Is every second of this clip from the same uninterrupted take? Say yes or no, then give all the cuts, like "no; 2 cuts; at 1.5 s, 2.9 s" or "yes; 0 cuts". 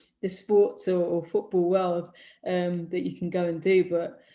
yes; 0 cuts